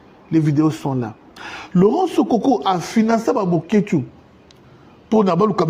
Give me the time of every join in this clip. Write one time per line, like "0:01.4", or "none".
none